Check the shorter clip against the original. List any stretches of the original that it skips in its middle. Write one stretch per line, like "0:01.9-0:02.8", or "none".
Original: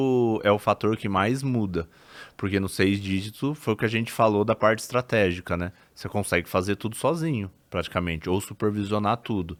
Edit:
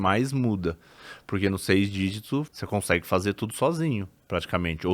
0:03.6-0:05.9